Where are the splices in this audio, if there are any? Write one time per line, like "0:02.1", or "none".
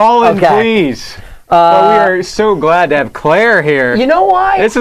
0:03.3